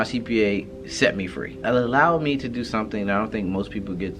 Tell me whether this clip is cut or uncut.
cut